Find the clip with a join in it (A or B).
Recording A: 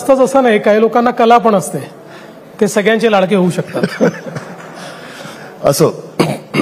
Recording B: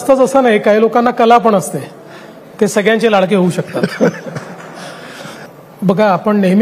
B